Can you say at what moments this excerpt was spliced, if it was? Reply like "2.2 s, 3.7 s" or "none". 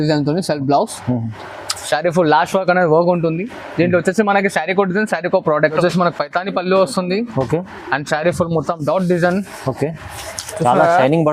5.8 s